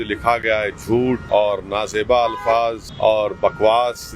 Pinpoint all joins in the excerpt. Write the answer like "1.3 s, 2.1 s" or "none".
1.2 s, 2.9 s